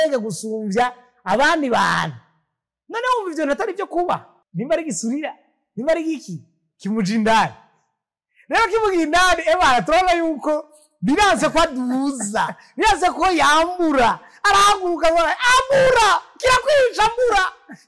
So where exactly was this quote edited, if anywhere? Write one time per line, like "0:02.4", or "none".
0:04.4